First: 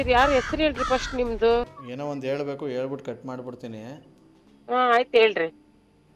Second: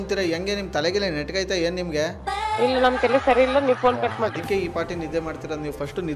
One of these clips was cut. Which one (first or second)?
first